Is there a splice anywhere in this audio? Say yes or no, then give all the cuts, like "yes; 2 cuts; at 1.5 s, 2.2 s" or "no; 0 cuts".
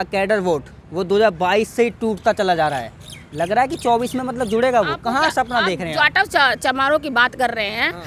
no; 0 cuts